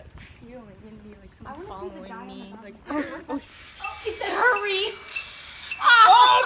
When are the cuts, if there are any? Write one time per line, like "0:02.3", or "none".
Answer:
0:03.6